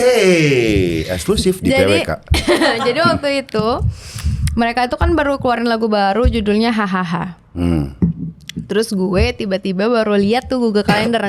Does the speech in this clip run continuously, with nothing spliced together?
yes; 0 cuts

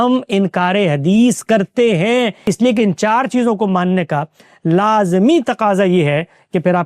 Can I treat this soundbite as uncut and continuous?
no; 1 cut; at 2.4 s

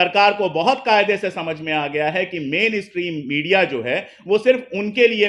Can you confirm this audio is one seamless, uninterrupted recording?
yes; 0 cuts

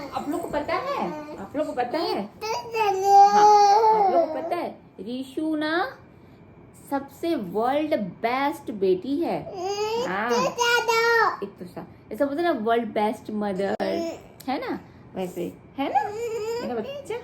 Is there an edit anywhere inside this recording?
no; 0 cuts

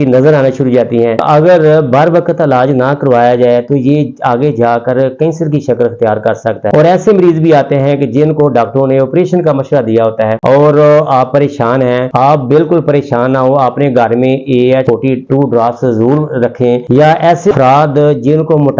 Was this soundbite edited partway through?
yes; 5 cuts; at 1.2 s, 6.7 s, 10.4 s, 16.8 s, 17.5 s

